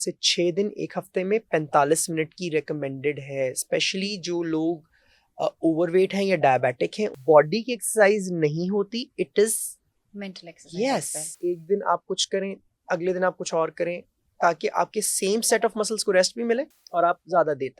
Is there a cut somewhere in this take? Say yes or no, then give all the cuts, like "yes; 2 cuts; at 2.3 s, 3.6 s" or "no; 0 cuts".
yes; 3 cuts; at 7.1 s, 11.2 s, 16.8 s